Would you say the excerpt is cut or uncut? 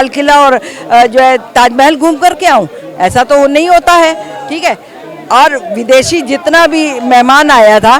uncut